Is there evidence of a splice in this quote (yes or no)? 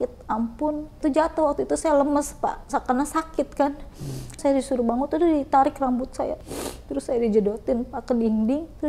yes